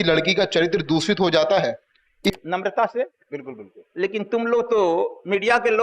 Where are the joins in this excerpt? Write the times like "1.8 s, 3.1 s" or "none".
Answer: 2.4 s